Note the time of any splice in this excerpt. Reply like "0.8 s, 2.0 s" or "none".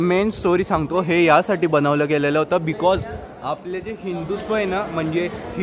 none

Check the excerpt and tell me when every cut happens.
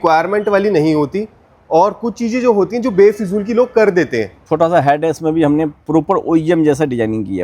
4.4 s

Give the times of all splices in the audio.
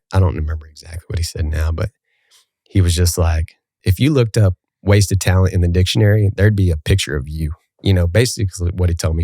3.8 s

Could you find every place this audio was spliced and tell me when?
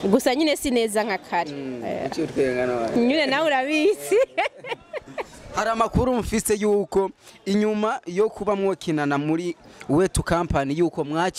none

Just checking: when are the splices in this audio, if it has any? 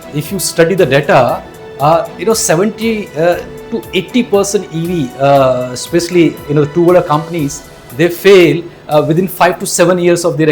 none

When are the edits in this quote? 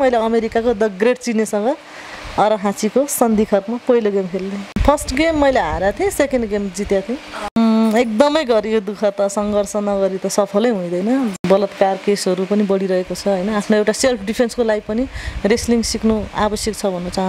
4.8 s, 7.6 s, 11.3 s

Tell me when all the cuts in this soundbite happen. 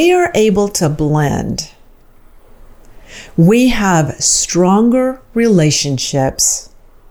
none

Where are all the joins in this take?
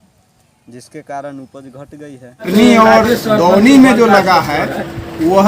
2.5 s

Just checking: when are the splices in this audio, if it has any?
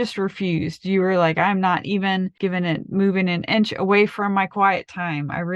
none

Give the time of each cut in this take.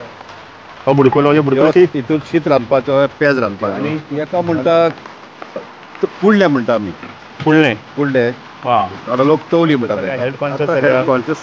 4.3 s, 10.4 s

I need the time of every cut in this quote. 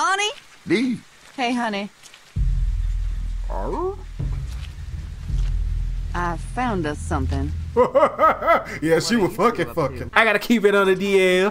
10.0 s

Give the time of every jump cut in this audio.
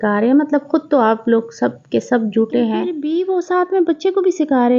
3.0 s

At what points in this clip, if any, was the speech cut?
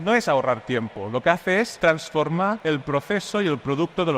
1.7 s, 2.6 s

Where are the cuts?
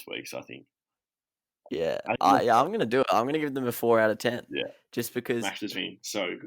5.4 s

